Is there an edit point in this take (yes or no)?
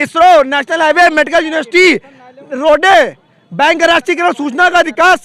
no